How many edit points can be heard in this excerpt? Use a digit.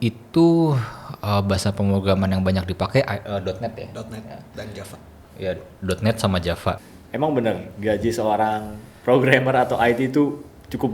1